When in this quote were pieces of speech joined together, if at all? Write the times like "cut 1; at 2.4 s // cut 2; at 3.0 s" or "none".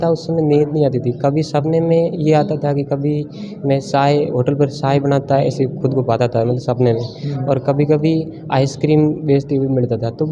none